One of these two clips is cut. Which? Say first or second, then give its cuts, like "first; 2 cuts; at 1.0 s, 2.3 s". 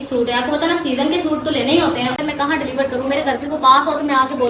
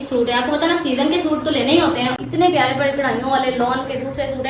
first; 1 cut; at 2.2 s